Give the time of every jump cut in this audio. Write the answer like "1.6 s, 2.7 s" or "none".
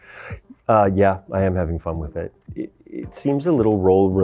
2.6 s